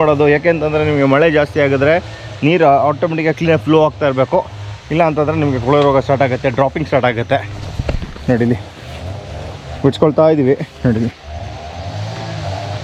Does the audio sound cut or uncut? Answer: uncut